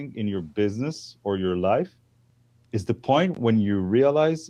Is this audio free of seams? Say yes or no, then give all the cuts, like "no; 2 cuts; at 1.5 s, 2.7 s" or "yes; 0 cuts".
yes; 0 cuts